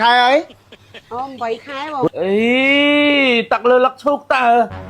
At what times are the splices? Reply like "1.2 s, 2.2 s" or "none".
2.0 s